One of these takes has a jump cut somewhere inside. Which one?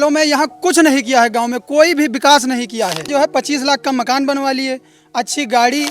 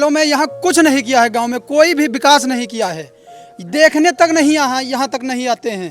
first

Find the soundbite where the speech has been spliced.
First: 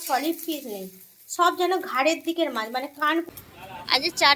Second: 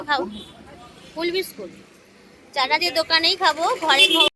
first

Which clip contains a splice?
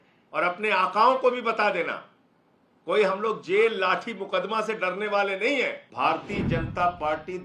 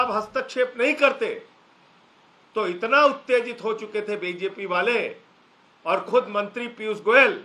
first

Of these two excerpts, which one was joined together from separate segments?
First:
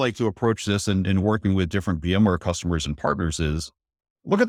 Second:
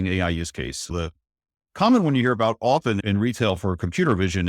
second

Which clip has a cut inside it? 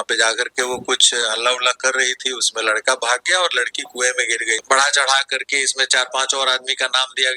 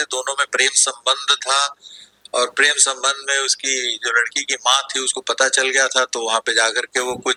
first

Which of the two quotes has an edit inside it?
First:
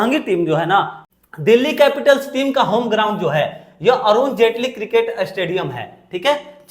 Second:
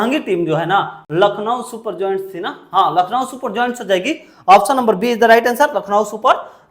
first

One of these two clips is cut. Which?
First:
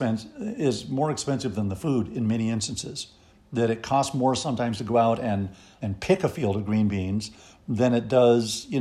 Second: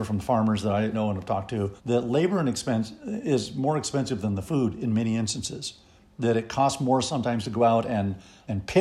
second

